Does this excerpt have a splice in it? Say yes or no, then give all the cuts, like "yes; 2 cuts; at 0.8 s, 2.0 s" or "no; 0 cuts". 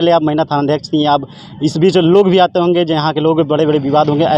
no; 0 cuts